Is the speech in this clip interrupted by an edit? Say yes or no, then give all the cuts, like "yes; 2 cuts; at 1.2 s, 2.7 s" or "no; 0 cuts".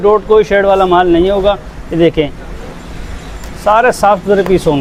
no; 0 cuts